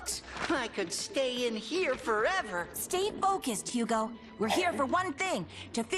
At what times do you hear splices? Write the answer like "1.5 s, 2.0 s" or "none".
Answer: 4.6 s